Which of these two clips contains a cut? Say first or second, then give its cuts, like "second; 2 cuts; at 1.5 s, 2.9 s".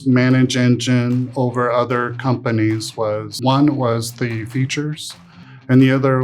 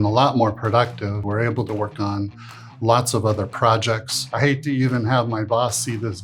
second; 2 cuts; at 1.2 s, 4.2 s